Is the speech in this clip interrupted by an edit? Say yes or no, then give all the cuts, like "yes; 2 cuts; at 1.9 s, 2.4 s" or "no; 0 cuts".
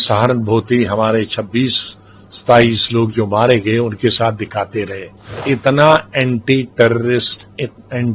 yes; 1 cut; at 5.4 s